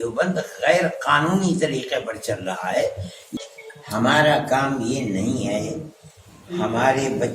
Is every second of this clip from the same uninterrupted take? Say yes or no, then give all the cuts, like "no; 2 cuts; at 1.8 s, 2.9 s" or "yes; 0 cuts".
no; 1 cut; at 3.3 s